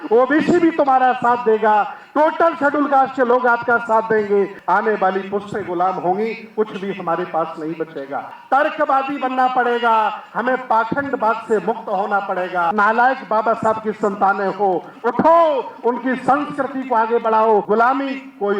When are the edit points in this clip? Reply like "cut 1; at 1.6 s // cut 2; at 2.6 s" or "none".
cut 1; at 4.6 s // cut 2; at 8.4 s // cut 3; at 12.7 s // cut 4; at 17.6 s